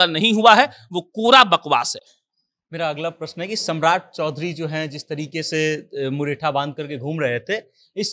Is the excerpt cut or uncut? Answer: uncut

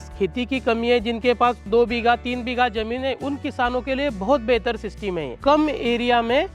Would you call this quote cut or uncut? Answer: cut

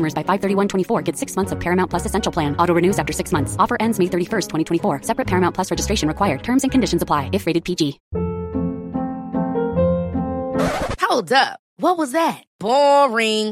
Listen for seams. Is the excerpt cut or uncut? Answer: cut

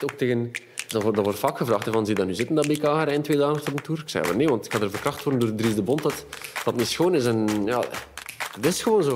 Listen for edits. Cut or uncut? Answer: uncut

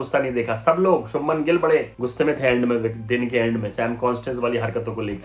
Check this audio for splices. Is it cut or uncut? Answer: uncut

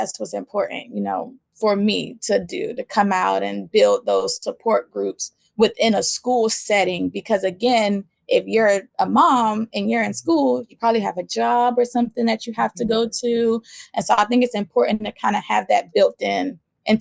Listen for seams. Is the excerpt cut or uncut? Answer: uncut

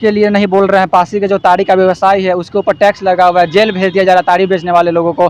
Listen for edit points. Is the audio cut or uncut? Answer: uncut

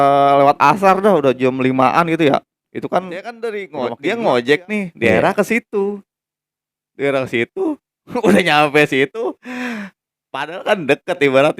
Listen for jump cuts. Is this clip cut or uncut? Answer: cut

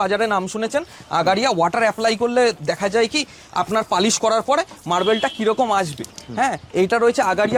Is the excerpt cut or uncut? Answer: uncut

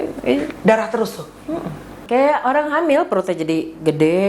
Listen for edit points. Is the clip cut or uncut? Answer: cut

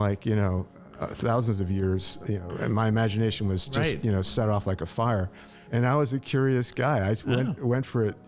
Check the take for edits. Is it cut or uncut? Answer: cut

